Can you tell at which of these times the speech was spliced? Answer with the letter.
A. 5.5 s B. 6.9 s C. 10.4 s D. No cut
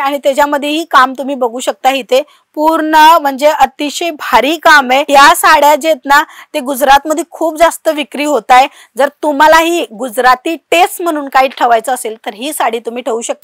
D